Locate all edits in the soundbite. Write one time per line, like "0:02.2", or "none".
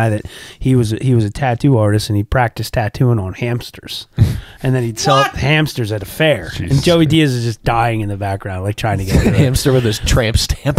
none